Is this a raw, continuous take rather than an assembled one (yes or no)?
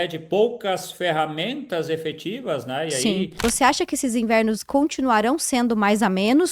no